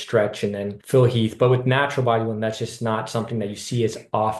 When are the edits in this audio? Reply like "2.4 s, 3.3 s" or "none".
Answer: none